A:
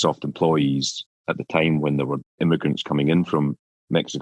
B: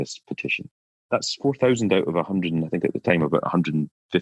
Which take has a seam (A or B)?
A